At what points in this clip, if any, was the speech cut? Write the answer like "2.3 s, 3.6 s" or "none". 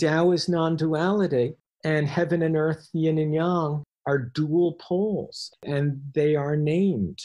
1.7 s, 3.9 s, 5.5 s